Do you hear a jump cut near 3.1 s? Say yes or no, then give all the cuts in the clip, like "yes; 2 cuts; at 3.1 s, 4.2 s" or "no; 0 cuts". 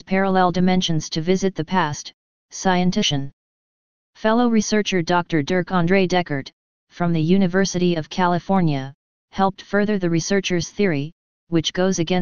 no; 0 cuts